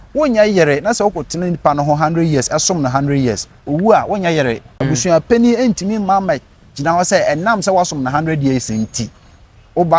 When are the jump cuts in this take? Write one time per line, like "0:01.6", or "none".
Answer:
0:04.7